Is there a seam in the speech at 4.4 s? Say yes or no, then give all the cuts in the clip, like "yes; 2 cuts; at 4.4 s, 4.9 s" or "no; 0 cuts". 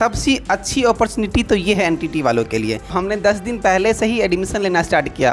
no; 1 cut; at 2.9 s